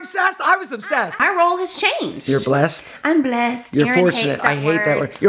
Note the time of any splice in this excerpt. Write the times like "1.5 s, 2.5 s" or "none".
1.2 s